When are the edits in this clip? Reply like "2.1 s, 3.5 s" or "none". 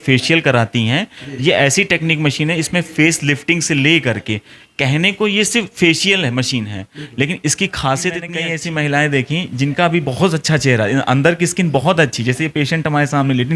8.3 s